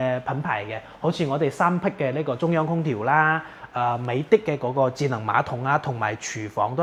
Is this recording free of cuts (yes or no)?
yes